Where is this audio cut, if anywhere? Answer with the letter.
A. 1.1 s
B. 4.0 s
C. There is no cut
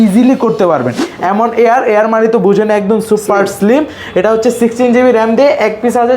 A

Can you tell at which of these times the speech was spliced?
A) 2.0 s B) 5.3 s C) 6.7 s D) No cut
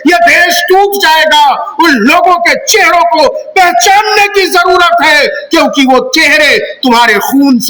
D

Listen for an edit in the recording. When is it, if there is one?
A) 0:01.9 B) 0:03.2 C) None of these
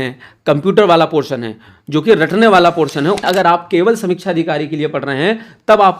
B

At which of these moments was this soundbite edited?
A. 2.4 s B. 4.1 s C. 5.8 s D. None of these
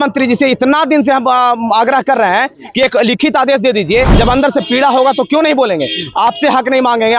B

